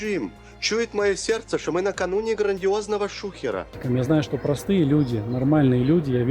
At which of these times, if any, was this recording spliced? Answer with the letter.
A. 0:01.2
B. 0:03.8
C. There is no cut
B